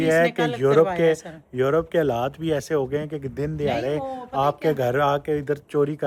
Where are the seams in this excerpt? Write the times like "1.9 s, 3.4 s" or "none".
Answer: none